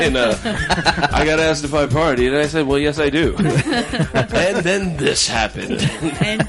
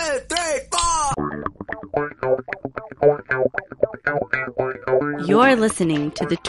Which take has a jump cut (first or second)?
first